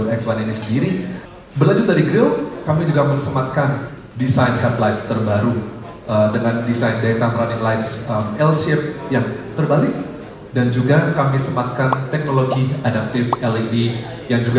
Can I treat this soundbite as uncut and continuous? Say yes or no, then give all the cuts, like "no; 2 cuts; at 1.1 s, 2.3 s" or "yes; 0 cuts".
no; 1 cut; at 1.2 s